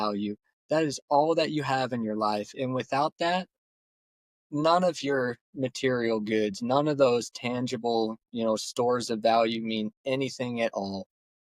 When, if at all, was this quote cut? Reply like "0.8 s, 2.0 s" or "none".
none